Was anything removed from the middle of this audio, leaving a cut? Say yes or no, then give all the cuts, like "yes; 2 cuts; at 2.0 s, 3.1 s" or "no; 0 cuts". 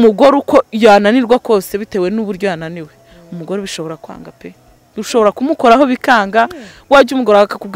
no; 0 cuts